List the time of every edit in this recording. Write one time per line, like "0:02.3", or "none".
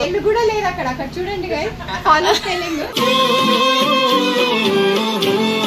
none